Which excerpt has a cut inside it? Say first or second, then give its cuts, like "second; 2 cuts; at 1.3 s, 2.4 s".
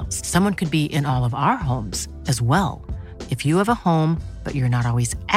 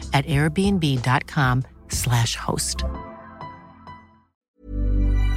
second; 1 cut; at 4.3 s